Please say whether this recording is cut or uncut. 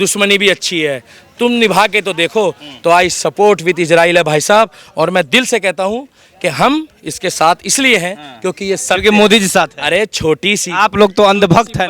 uncut